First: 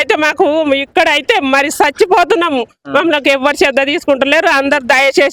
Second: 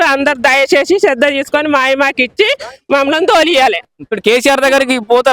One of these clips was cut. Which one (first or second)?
second